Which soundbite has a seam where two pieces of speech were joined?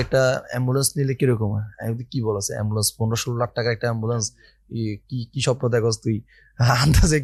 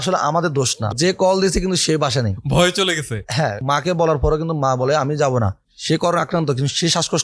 second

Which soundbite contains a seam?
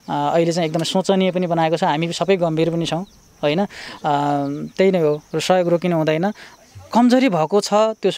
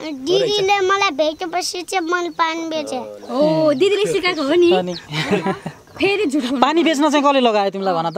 first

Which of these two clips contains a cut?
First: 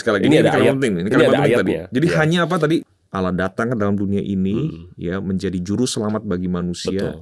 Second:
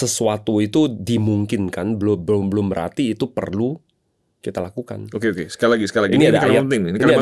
first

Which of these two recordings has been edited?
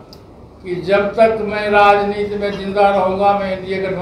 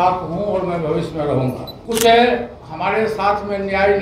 second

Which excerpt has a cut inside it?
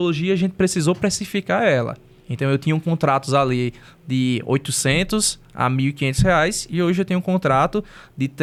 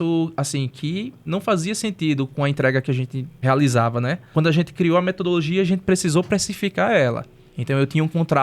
second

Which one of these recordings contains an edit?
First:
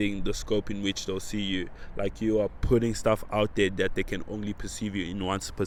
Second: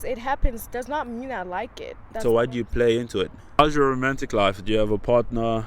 second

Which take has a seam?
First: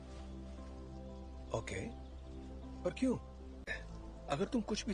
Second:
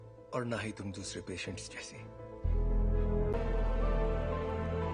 second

